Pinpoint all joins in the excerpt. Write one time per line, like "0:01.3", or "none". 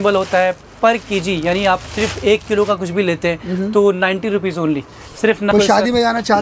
0:05.5